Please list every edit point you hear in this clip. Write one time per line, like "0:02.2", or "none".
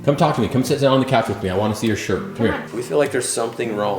0:02.7